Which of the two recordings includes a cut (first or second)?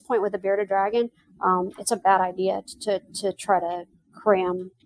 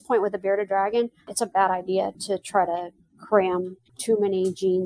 second